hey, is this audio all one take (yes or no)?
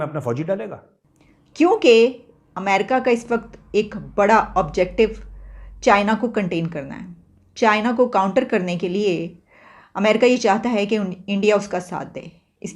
no